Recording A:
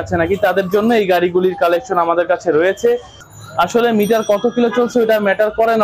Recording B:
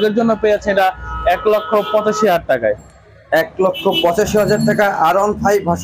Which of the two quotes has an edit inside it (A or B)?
A